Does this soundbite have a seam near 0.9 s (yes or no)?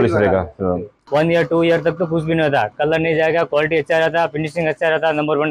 yes